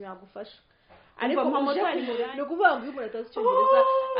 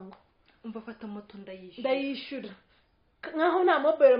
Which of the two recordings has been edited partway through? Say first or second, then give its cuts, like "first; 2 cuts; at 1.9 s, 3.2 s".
first; 1 cut; at 2.1 s